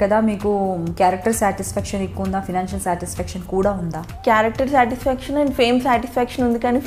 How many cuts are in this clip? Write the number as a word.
one